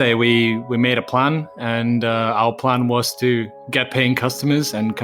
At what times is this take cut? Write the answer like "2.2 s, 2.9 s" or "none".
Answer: none